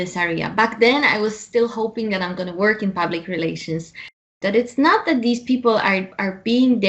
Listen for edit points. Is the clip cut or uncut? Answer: cut